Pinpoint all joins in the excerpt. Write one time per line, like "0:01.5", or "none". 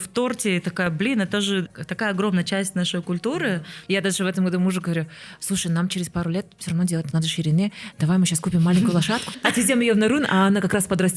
0:01.7
0:03.7
0:09.3

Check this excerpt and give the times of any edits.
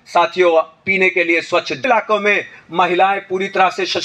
0:01.8

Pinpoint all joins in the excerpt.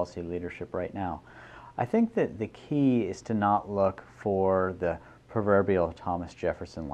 0:05.3

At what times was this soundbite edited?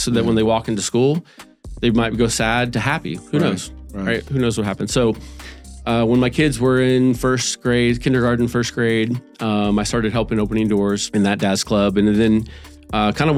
none

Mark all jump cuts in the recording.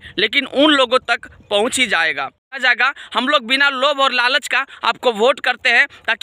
0:02.6

